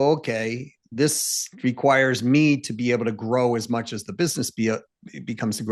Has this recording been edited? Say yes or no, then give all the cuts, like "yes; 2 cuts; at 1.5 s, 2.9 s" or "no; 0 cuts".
no; 0 cuts